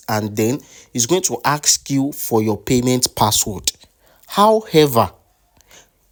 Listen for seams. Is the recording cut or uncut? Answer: uncut